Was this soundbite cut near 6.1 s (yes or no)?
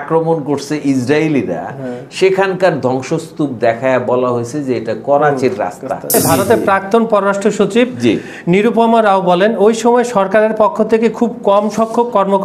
yes